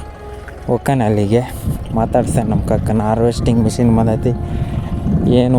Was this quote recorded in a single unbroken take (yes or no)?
yes